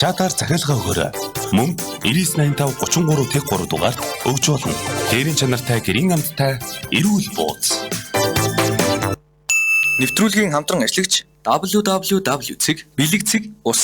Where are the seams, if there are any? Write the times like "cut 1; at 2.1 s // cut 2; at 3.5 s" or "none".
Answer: cut 1; at 9.8 s